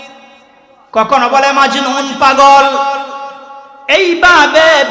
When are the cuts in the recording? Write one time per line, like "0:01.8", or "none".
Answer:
none